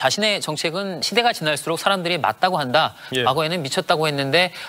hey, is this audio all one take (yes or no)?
no